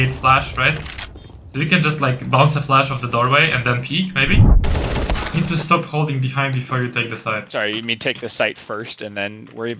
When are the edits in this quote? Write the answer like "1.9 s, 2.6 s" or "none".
4.5 s, 7.5 s